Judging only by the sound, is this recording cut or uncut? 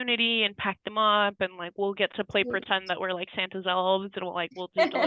uncut